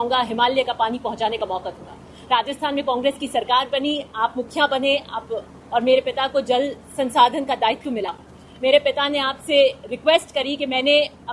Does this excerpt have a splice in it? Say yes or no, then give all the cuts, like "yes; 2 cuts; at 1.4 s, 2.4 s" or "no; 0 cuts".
no; 0 cuts